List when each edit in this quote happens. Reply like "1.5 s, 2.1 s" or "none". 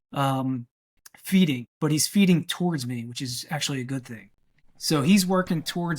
1.7 s, 4.5 s